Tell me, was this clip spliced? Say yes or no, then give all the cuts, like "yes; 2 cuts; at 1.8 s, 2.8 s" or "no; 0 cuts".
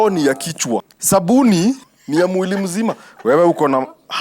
yes; 2 cuts; at 0.9 s, 1.9 s